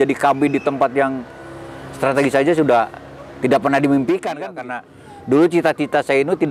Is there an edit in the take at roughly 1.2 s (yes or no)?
no